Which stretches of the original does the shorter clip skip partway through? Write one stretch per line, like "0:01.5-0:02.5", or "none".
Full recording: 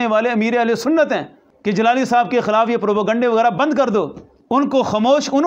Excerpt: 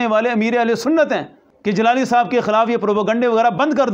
none